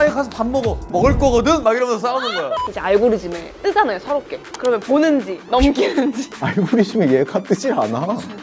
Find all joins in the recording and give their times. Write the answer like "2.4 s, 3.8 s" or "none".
2.7 s, 3.4 s, 4.4 s, 5.4 s, 6.3 s